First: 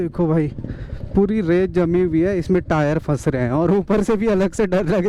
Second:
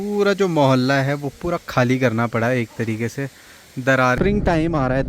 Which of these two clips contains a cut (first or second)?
second